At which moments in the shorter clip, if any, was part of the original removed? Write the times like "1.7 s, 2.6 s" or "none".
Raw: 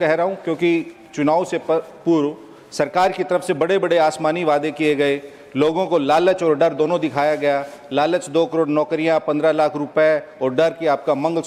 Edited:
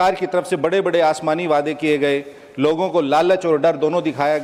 none